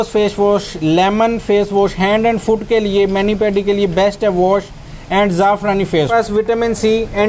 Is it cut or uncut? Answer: cut